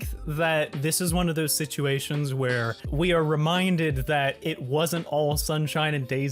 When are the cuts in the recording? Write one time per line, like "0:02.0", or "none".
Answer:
0:02.8